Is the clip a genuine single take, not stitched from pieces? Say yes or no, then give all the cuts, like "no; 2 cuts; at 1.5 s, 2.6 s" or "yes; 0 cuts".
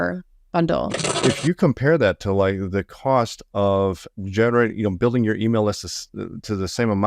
no; 1 cut; at 1.1 s